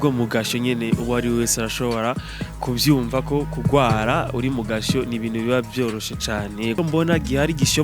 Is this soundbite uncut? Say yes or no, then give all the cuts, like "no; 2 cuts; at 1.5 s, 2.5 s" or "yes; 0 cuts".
no; 1 cut; at 6.8 s